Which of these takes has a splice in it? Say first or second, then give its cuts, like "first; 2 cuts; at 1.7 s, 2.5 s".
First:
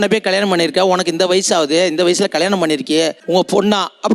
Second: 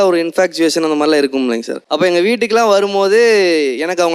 second; 1 cut; at 1.8 s